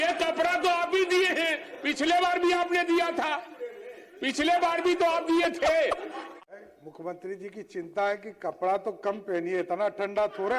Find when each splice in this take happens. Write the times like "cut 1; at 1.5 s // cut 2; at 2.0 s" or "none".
cut 1; at 6.5 s